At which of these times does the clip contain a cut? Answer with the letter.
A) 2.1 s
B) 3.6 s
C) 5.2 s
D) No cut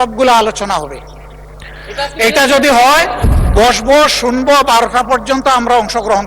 D